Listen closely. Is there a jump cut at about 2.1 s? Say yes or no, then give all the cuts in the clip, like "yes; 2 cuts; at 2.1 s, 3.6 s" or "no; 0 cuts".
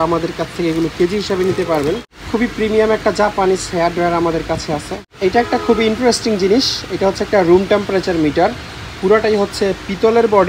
yes; 2 cuts; at 2.1 s, 5.0 s